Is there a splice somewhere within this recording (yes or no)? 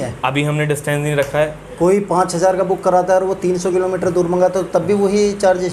no